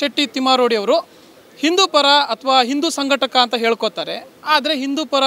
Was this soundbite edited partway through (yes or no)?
no